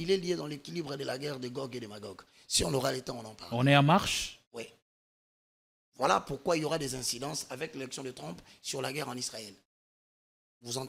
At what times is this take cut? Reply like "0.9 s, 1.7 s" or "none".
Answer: none

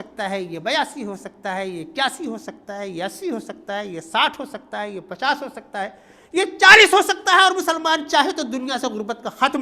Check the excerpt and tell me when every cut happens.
none

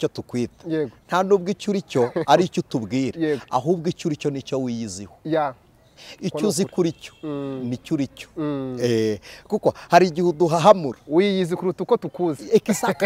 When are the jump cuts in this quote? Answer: none

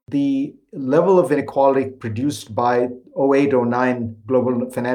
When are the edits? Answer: 1.4 s

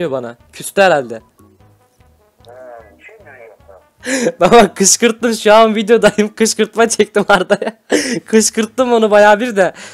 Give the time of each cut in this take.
none

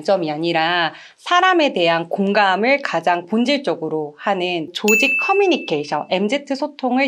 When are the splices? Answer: 4.7 s

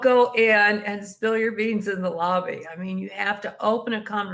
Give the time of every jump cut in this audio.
none

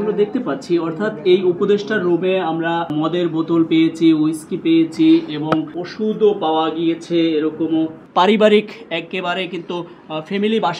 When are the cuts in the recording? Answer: 2.9 s, 5.8 s, 8.0 s

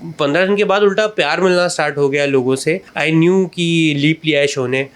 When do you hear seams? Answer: 2.9 s

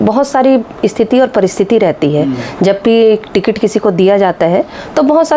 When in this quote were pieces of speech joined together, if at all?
none

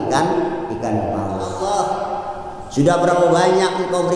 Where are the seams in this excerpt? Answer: 1.6 s

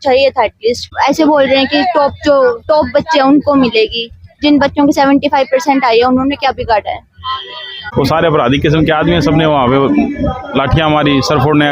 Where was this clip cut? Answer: 0.9 s, 7.9 s

